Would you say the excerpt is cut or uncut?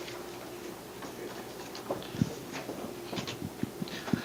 uncut